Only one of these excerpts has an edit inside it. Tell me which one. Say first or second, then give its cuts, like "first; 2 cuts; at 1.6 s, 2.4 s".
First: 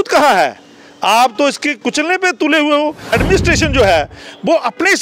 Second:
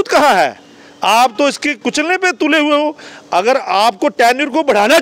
first; 1 cut; at 3.1 s